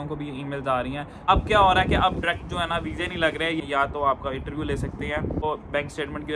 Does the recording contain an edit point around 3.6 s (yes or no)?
yes